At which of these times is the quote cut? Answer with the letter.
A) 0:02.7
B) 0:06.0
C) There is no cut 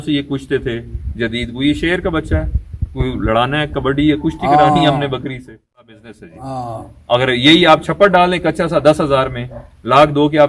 B